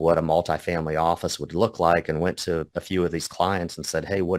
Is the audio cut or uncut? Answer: uncut